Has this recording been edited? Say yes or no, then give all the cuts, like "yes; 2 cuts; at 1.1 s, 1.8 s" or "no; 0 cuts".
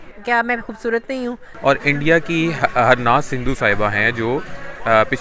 yes; 1 cut; at 1.4 s